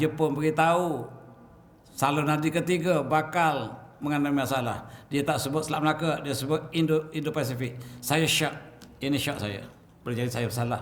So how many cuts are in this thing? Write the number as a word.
zero